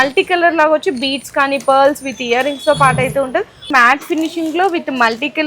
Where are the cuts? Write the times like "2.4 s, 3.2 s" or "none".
3.7 s